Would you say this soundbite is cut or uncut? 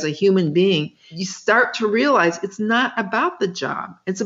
cut